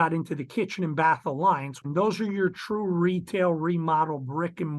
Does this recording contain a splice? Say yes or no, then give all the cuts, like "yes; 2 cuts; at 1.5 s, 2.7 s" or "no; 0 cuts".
yes; 1 cut; at 1.8 s